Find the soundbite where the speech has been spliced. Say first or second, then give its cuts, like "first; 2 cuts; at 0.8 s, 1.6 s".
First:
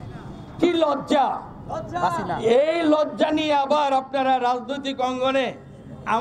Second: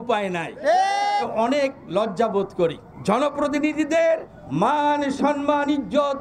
second; 3 cuts; at 1.2 s, 2.9 s, 4.4 s